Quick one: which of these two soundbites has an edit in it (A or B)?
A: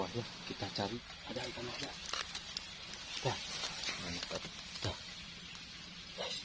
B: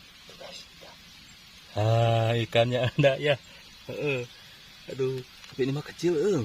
A